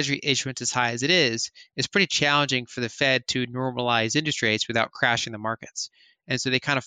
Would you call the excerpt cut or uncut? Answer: uncut